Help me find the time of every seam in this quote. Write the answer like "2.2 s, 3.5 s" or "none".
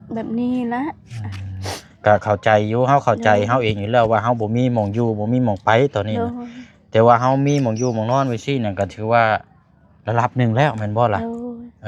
none